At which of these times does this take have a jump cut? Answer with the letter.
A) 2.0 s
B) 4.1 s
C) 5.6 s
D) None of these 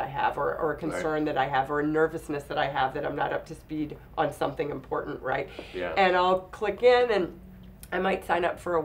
D